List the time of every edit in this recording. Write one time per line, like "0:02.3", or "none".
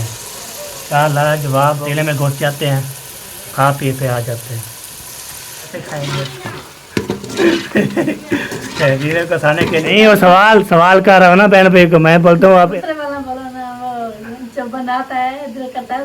0:01.8
0:05.8
0:09.9
0:12.7